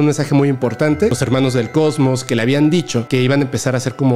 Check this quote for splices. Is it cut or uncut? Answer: cut